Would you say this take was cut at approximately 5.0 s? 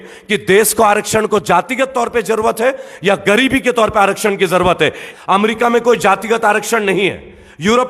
yes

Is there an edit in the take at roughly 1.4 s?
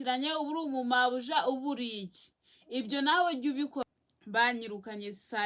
no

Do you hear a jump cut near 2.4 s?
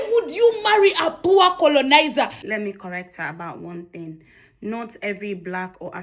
yes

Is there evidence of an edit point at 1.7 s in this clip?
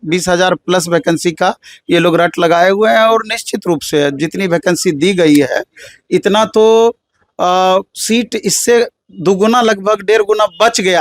no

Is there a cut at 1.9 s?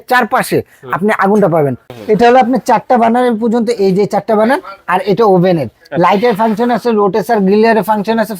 yes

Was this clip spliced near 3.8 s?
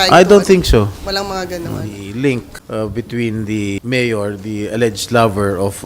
yes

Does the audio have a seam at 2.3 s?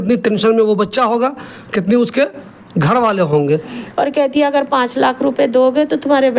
no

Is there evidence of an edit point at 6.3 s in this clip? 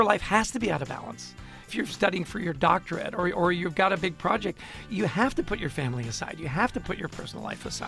no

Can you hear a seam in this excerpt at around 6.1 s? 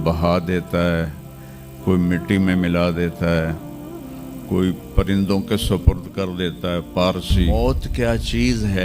no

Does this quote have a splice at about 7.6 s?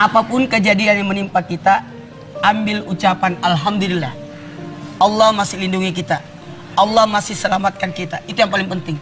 yes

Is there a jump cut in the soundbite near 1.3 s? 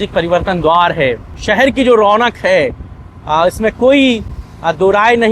yes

